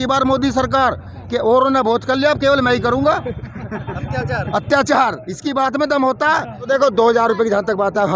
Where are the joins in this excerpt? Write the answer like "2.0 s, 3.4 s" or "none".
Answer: 6.7 s